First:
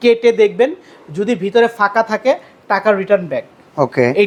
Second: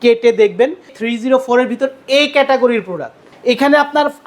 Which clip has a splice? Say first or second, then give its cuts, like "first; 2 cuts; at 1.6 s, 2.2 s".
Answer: second; 2 cuts; at 1.0 s, 3.2 s